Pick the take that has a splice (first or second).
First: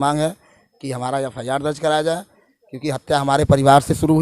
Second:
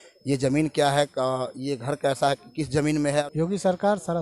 second